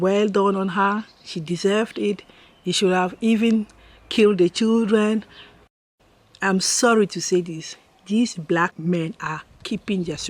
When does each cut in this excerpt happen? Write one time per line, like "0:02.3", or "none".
0:05.7
0:08.8